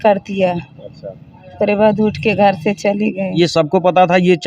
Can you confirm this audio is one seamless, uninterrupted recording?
no; 1 cut; at 3.3 s

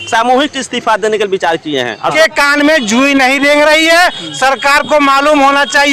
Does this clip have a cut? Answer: yes; 1 cut; at 2.1 s

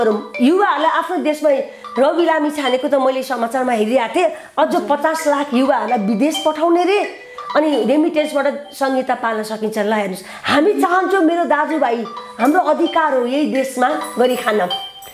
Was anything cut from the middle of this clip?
no; 0 cuts

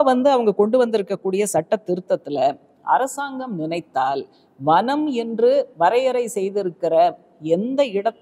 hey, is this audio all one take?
no; 1 cut; at 5.7 s

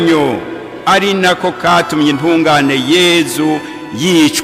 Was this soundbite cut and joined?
no; 0 cuts

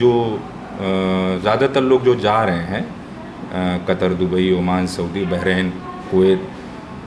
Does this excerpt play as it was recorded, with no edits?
yes; 0 cuts

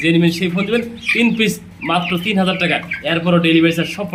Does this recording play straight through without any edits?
yes; 0 cuts

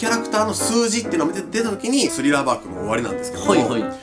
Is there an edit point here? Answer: yes; 1 cut; at 2.2 s

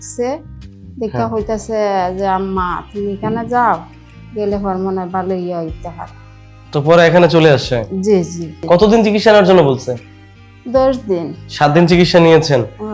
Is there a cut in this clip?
yes; 2 cuts; at 8.6 s, 11.4 s

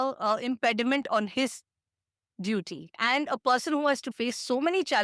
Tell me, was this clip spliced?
yes; 2 cuts; at 2.9 s, 4.1 s

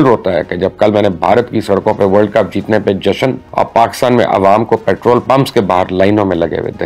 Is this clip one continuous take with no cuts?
yes; 0 cuts

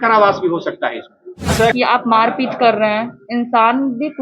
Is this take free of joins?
no; 1 cut; at 1.7 s

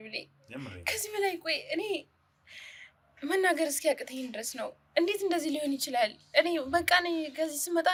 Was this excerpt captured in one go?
yes; 0 cuts

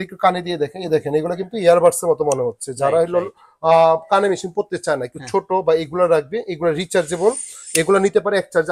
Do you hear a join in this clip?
no; 0 cuts

